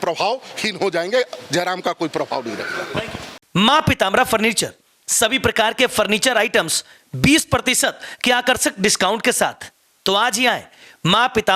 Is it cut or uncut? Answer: uncut